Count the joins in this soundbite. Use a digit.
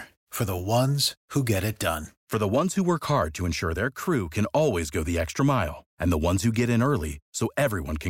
1